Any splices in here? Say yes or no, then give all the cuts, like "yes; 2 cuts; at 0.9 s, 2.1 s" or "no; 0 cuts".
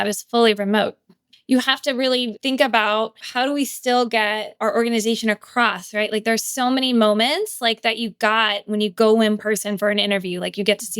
yes; 4 cuts; at 1.2 s, 2.3 s, 3.2 s, 4.5 s